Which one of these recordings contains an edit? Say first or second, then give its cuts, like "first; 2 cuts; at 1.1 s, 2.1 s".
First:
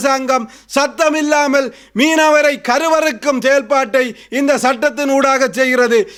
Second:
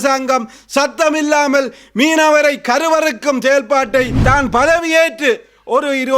second; 1 cut; at 4.2 s